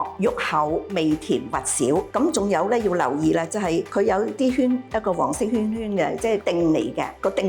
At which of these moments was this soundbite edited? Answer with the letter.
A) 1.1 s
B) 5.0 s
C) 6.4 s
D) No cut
C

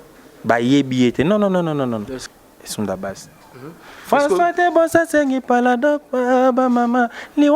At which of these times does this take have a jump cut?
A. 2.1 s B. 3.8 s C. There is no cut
A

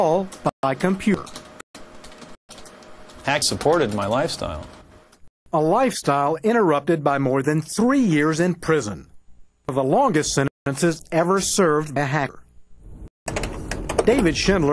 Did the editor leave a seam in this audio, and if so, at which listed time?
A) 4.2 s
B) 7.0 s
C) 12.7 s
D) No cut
A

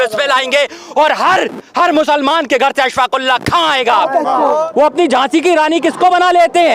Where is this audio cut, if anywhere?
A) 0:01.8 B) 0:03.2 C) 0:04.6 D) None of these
C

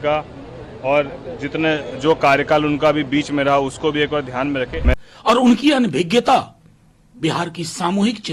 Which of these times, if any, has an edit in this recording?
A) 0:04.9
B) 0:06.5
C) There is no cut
A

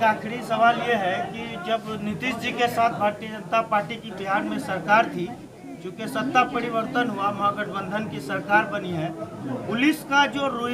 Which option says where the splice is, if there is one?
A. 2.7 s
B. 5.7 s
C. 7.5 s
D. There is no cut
D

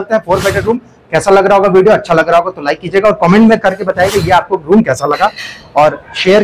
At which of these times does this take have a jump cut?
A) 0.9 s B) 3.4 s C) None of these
C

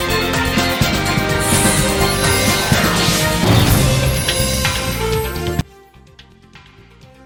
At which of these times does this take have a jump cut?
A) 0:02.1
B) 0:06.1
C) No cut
C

